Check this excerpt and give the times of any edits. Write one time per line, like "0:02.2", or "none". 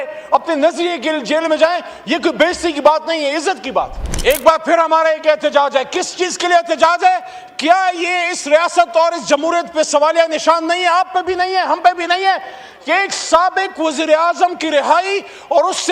0:04.0